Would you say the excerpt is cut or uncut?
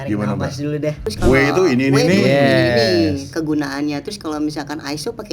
cut